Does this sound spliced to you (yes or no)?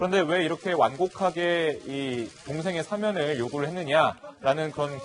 yes